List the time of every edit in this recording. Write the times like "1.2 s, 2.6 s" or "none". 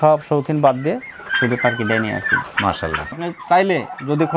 3.1 s